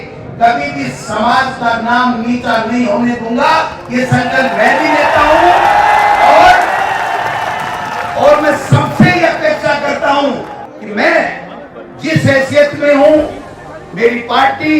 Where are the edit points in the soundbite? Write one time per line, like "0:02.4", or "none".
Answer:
0:10.5